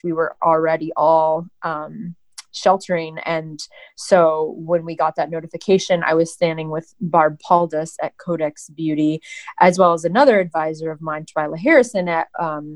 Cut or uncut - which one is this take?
uncut